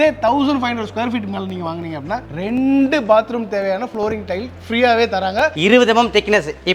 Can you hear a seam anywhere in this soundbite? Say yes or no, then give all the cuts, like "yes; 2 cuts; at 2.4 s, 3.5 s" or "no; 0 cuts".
yes; 1 cut; at 5.5 s